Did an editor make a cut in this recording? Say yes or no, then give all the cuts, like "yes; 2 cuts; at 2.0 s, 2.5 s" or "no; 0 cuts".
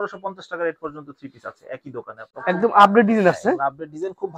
yes; 1 cut; at 2.2 s